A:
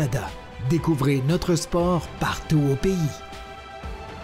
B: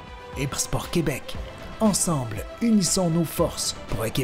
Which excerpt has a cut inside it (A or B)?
A